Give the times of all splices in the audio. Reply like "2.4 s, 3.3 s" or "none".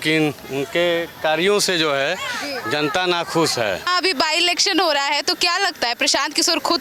none